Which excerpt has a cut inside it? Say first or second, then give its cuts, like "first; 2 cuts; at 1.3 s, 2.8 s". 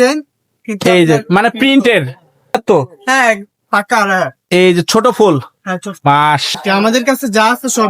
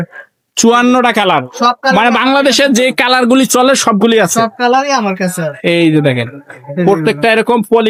first; 2 cuts; at 2.6 s, 6.5 s